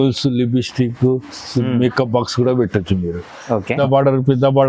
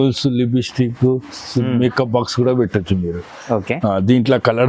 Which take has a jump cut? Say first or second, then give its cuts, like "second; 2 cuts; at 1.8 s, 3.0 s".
first; 1 cut; at 3.8 s